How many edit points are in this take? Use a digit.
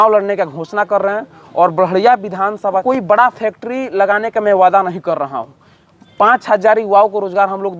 1